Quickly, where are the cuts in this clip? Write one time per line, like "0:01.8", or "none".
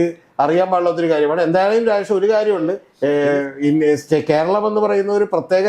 0:02.9

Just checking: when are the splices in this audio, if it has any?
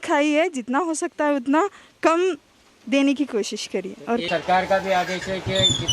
0:04.3

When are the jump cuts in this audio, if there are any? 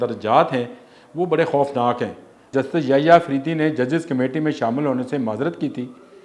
0:02.5

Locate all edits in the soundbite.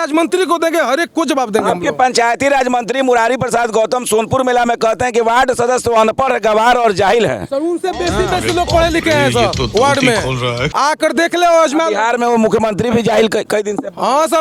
none

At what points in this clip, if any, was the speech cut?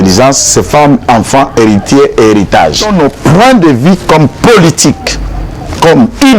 0:02.8

